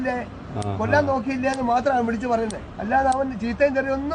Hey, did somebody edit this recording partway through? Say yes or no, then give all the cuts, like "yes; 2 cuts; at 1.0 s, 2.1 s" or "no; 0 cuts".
yes; 1 cut; at 2.7 s